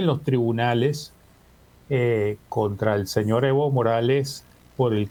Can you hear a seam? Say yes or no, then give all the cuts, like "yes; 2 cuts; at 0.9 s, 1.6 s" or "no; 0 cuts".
no; 0 cuts